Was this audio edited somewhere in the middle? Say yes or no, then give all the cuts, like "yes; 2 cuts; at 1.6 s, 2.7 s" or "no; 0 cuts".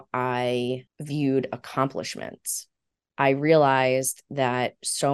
yes; 1 cut; at 0.9 s